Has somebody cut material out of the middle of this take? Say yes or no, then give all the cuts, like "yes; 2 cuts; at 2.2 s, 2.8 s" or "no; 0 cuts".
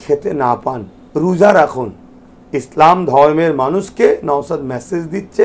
no; 0 cuts